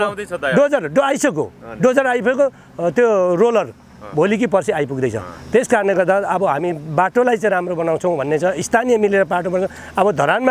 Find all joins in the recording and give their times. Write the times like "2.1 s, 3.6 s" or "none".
none